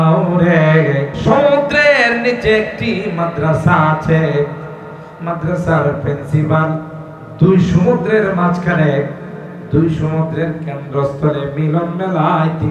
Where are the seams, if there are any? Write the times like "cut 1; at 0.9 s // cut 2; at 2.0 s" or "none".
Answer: cut 1; at 1.1 s